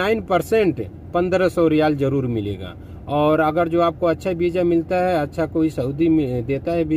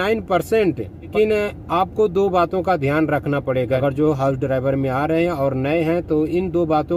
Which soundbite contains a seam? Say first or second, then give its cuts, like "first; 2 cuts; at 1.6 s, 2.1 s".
second; 2 cuts; at 1.1 s, 3.8 s